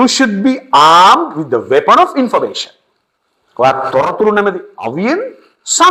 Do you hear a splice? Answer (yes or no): no